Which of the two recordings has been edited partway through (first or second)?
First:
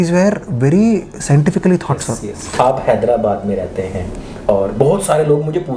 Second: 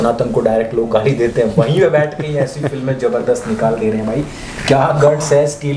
first